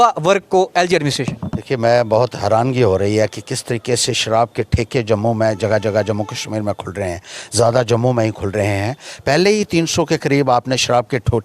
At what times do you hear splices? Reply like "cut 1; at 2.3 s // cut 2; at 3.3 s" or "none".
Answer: none